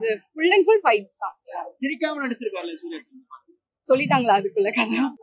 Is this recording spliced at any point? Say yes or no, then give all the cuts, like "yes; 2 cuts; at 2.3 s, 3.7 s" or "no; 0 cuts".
no; 0 cuts